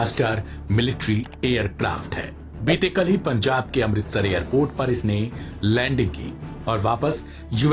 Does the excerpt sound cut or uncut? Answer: uncut